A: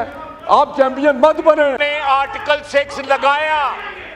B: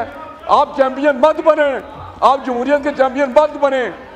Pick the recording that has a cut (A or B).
A